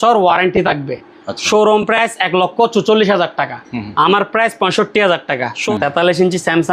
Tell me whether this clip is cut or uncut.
cut